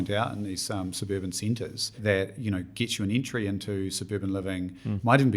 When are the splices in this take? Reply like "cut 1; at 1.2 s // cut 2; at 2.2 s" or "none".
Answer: cut 1; at 2.0 s